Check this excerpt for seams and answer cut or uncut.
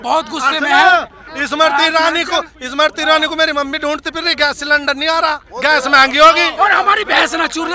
uncut